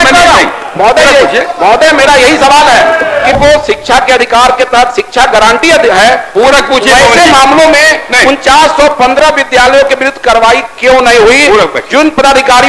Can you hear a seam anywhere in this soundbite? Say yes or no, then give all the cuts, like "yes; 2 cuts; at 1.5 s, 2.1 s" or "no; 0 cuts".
yes; 1 cut; at 3.3 s